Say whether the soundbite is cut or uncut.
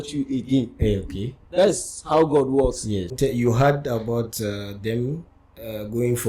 cut